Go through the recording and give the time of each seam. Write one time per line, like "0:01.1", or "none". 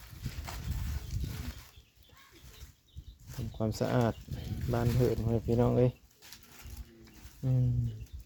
none